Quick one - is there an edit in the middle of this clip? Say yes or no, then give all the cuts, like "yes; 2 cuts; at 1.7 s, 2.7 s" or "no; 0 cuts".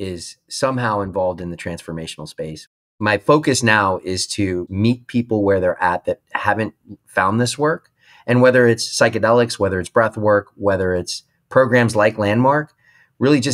yes; 2 cuts; at 2.9 s, 4.6 s